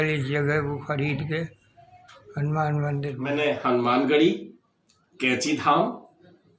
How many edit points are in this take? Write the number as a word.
one